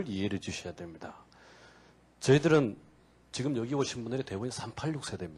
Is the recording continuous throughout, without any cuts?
yes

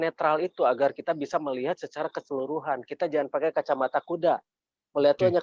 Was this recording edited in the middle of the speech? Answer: no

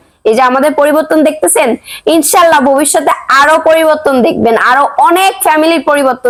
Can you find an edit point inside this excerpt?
no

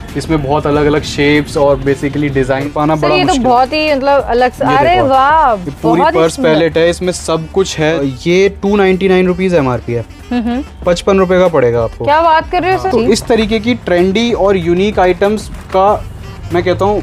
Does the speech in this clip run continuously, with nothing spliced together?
no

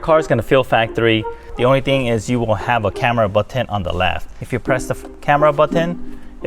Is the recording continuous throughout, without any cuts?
no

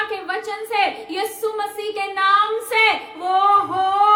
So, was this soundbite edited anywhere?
no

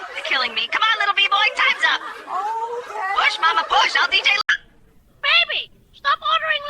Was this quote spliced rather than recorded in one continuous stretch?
yes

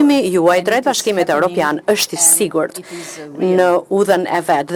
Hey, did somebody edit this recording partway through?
no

